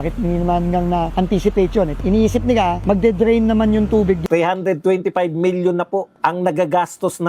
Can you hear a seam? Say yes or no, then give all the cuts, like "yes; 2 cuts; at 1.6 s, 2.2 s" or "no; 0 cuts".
yes; 2 cuts; at 4.2 s, 6.1 s